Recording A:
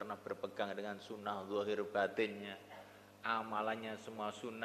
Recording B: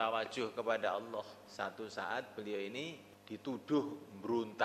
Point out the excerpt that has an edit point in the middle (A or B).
B